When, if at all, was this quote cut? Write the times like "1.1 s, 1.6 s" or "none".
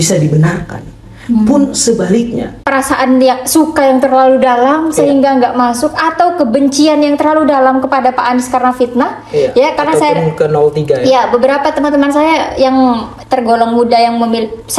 2.5 s